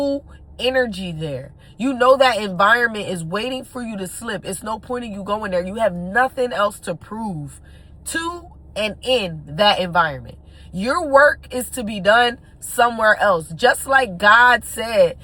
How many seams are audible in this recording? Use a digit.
0